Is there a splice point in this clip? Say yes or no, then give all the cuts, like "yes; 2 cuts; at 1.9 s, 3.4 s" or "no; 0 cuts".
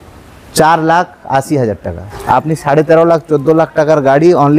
yes; 1 cut; at 2.1 s